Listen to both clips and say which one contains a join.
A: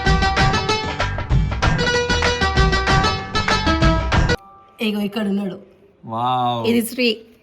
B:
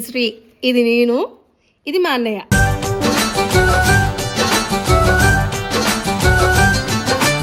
A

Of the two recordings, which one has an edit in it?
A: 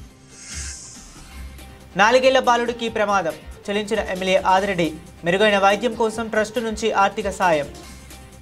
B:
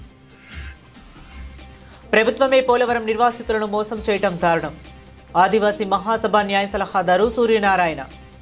B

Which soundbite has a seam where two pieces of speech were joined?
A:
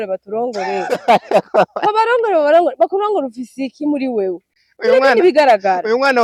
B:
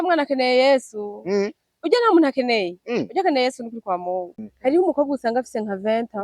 B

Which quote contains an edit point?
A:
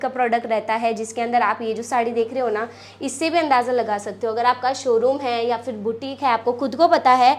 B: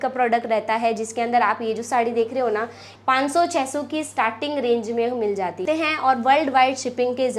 B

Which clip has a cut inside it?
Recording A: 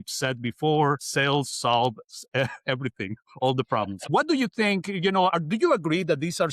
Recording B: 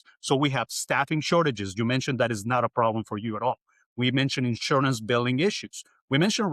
A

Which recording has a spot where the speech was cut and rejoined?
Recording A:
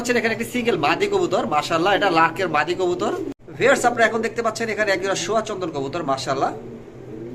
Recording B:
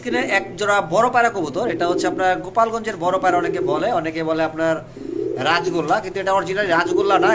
A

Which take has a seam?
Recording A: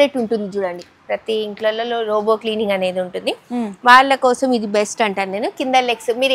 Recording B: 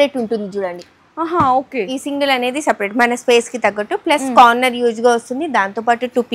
A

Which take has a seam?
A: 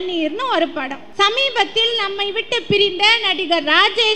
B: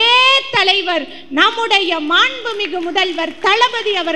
A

